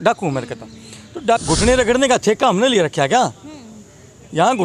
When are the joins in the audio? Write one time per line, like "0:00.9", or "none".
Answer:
0:01.4